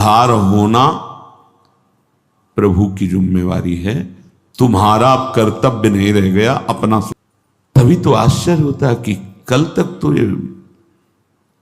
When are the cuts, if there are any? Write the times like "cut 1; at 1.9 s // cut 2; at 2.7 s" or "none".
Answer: cut 1; at 7.1 s